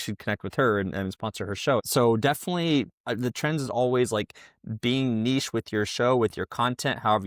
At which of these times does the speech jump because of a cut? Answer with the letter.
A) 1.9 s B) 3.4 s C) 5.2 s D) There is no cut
A